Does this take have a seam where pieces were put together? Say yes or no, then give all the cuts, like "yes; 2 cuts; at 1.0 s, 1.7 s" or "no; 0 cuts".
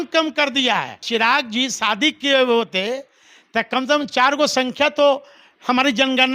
yes; 1 cut; at 1.0 s